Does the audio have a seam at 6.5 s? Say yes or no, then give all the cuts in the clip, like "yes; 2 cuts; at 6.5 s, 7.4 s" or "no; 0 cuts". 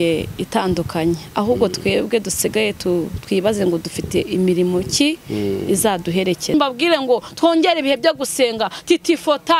yes; 1 cut; at 6.5 s